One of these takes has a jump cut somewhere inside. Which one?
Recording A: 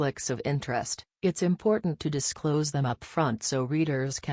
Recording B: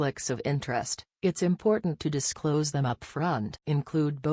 B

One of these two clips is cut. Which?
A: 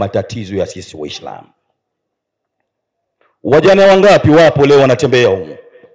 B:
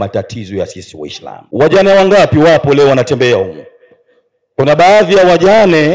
B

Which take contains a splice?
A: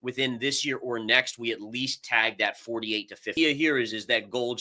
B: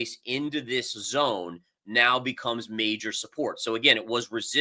A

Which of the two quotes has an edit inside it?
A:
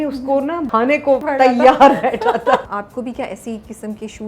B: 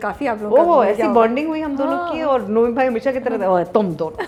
A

